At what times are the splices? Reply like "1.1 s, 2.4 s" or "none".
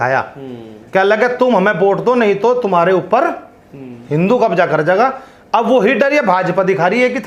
none